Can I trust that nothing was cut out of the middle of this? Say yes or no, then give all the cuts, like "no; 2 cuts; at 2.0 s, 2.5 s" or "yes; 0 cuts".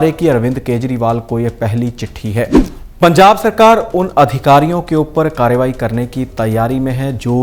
no; 1 cut; at 2.7 s